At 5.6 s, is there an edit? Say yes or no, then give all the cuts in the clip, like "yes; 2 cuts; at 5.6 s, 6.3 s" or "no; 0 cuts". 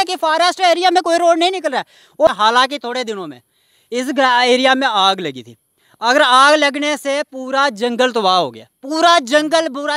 no; 1 cut; at 2.3 s